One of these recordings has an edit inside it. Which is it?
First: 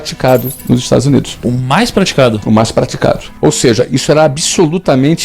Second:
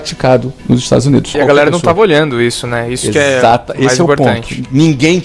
second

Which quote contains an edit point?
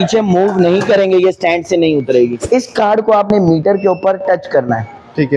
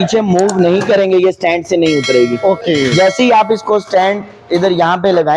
first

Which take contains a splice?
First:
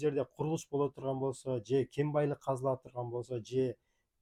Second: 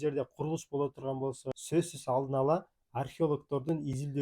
second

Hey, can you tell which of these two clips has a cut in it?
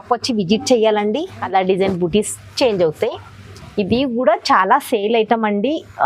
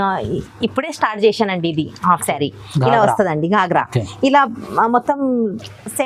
first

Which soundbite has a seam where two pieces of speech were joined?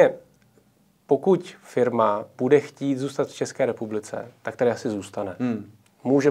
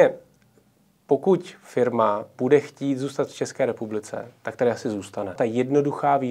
second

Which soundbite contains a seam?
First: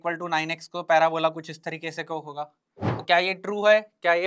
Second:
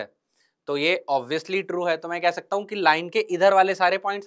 first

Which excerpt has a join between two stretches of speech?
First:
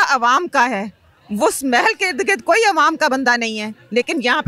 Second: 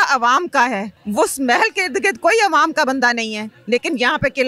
second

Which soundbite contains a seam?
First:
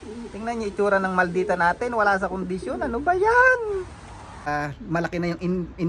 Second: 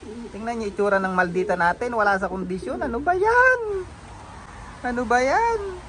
first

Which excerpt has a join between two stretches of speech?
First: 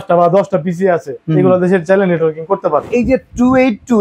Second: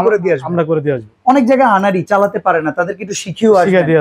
first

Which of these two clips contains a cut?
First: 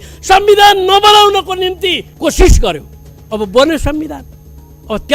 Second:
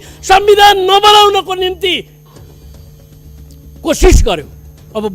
first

